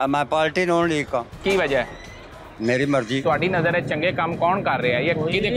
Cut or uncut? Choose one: cut